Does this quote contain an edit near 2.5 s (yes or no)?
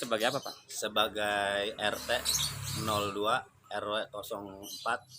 no